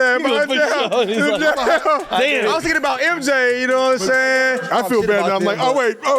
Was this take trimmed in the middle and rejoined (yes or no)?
yes